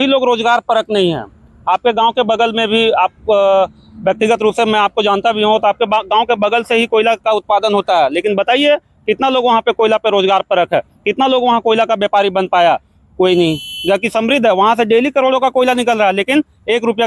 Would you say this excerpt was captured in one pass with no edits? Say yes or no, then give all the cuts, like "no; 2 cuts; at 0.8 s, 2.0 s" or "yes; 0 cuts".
yes; 0 cuts